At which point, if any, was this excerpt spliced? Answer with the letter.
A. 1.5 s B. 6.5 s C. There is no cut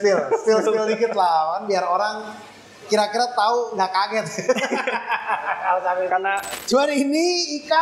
B